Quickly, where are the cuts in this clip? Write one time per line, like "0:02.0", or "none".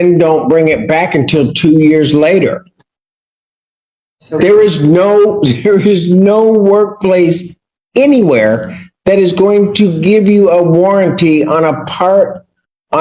none